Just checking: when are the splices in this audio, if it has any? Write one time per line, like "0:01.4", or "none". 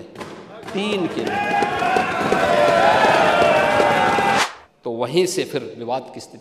0:04.4